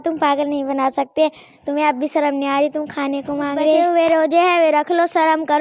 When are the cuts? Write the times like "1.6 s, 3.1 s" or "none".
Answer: 3.8 s